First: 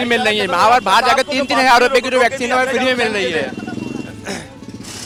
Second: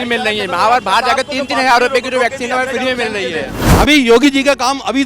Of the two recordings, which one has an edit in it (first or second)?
second